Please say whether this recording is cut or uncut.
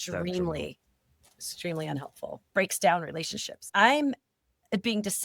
cut